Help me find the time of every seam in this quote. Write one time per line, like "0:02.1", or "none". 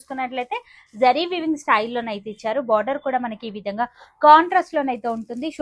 none